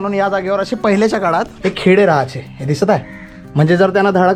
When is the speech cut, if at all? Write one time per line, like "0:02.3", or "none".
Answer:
none